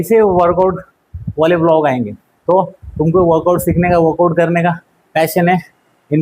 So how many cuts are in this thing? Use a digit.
0